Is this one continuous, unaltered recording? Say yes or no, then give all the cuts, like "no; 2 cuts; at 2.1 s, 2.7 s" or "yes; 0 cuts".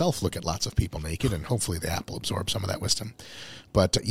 yes; 0 cuts